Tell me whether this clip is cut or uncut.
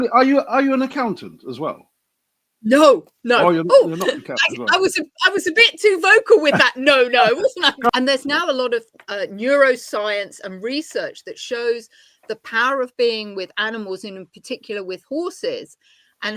cut